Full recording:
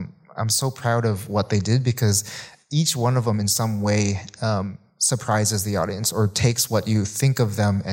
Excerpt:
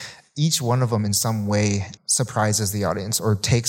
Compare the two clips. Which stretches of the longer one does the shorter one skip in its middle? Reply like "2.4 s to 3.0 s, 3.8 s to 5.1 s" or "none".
4.3 s to 4.9 s

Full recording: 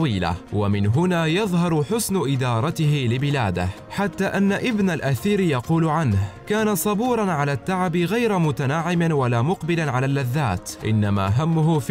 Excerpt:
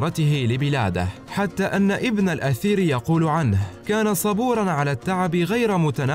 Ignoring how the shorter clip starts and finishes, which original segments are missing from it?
none

